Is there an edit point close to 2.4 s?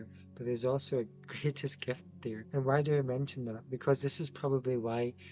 yes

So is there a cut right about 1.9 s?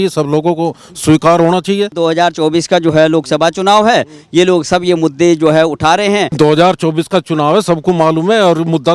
yes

